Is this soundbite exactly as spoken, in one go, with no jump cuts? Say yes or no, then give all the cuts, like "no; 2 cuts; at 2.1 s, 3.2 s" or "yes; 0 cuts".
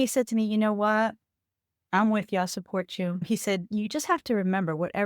no; 1 cut; at 3.2 s